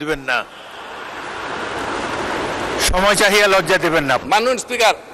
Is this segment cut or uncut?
cut